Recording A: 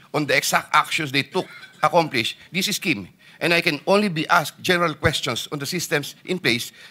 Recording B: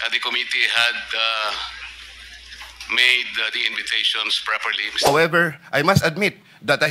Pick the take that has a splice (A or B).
B